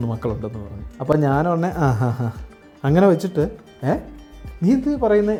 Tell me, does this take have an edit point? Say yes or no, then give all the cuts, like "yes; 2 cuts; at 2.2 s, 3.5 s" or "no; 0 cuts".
no; 0 cuts